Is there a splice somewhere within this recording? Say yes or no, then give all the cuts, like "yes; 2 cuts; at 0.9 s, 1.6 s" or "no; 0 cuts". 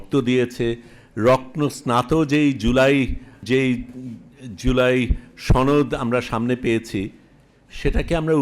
yes; 1 cut; at 3.4 s